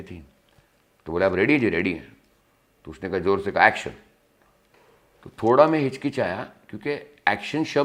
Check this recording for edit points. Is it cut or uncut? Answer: uncut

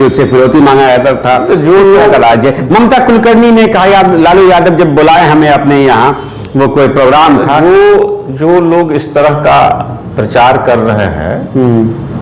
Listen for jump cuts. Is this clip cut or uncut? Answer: uncut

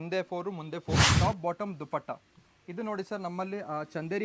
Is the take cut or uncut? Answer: cut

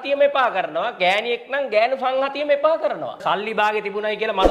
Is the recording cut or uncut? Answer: cut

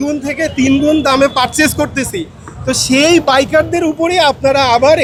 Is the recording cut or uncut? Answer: uncut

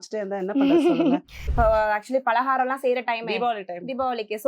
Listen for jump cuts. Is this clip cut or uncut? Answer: cut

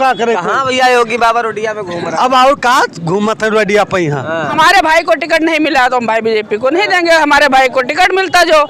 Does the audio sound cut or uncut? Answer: cut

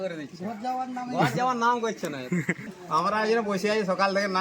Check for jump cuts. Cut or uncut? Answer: cut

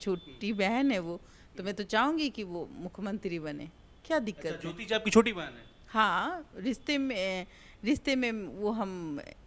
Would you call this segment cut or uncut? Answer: uncut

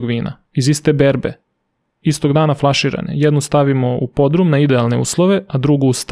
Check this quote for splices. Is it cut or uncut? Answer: uncut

